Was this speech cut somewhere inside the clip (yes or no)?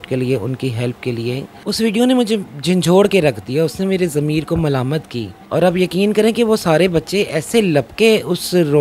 yes